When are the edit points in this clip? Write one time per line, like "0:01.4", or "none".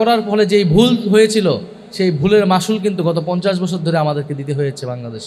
none